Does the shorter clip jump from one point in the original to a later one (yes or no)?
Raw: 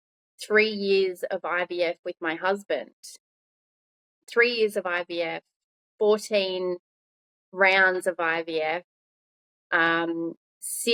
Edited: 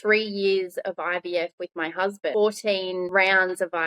yes